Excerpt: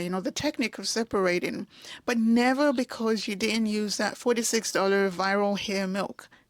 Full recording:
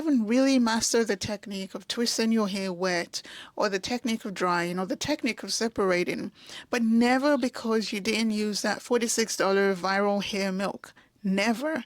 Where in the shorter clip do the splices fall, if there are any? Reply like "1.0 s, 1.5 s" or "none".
none